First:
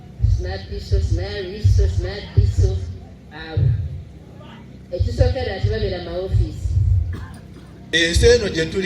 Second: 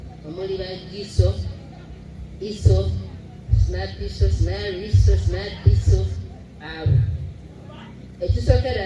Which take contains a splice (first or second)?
first